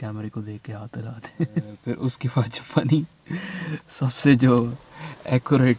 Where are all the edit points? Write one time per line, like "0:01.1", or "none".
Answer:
0:01.7